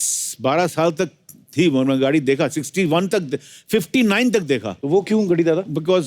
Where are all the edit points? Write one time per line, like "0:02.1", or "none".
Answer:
0:04.7